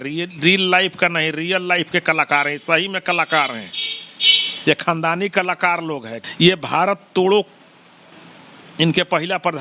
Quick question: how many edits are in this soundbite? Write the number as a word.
one